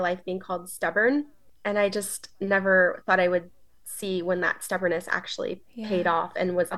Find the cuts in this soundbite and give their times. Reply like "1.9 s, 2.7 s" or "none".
none

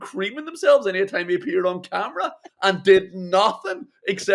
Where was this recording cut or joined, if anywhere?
none

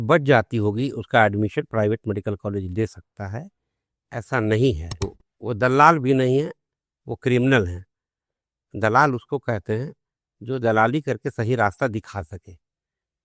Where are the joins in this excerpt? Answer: 5.2 s

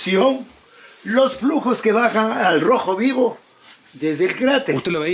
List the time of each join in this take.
none

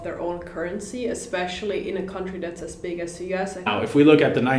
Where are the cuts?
3.7 s

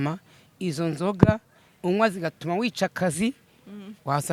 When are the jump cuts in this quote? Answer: none

